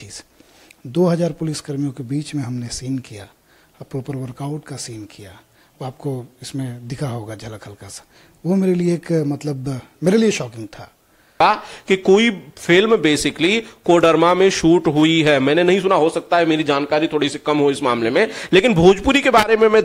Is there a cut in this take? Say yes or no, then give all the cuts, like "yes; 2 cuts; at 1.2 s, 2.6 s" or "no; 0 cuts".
yes; 1 cut; at 11.4 s